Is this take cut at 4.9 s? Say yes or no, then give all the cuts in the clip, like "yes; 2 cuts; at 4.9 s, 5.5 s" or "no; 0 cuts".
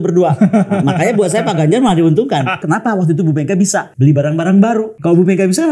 yes; 3 cuts; at 2.6 s, 3.9 s, 4.9 s